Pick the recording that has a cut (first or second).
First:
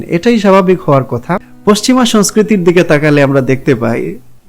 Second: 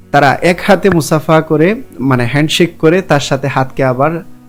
first